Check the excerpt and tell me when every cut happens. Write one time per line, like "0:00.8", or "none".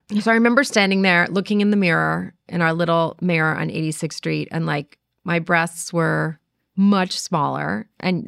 none